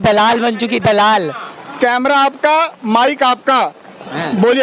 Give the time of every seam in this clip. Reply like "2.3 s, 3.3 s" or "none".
none